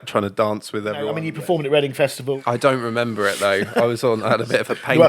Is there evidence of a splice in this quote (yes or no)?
yes